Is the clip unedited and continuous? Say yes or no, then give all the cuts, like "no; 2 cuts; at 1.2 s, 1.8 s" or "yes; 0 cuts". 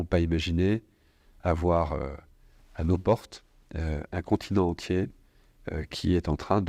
yes; 0 cuts